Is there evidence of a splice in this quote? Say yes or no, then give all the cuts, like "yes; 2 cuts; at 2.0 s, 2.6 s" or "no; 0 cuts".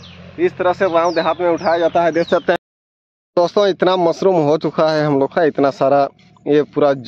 yes; 1 cut; at 2.6 s